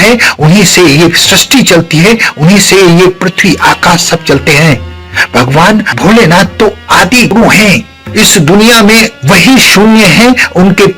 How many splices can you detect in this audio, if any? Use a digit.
1